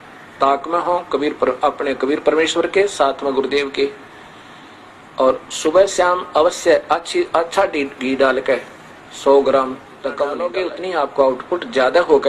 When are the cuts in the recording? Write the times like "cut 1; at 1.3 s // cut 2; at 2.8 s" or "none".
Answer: cut 1; at 10.5 s